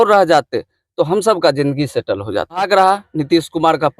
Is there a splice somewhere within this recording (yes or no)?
yes